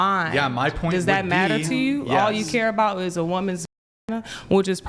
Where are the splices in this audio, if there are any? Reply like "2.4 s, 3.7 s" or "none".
none